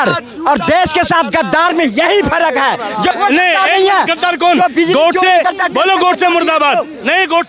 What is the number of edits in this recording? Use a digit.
1